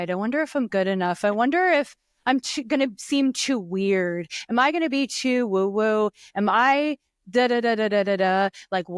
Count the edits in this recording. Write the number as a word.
zero